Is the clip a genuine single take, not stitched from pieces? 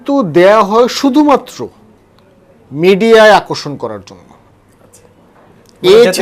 yes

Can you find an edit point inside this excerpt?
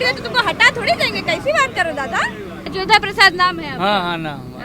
yes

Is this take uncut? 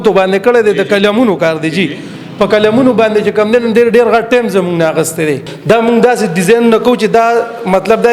no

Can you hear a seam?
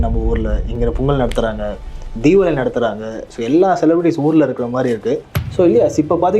yes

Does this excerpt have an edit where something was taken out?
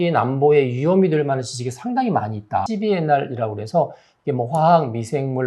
yes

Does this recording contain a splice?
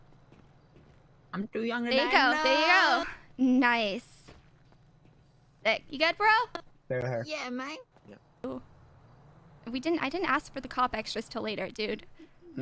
yes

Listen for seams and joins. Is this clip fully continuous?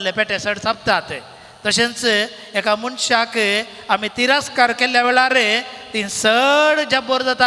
yes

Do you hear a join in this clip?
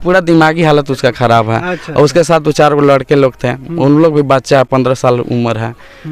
no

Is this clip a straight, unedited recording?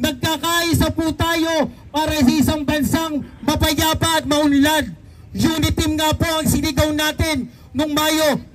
yes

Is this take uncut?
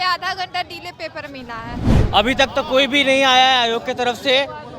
no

